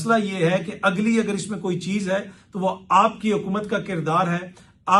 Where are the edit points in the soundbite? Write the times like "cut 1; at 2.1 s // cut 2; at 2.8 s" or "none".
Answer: none